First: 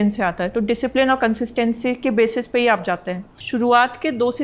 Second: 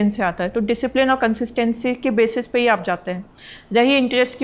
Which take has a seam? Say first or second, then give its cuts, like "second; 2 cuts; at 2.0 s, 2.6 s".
first; 1 cut; at 3.3 s